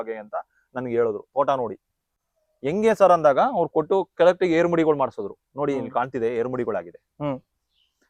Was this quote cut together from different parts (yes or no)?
no